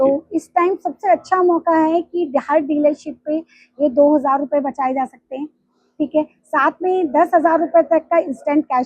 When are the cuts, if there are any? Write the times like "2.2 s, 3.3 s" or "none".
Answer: none